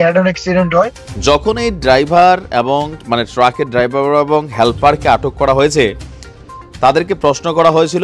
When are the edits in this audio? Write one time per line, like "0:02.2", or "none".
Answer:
0:01.1